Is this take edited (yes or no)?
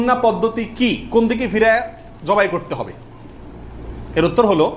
no